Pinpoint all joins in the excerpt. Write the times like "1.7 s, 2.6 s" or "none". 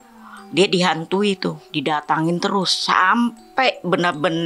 1.6 s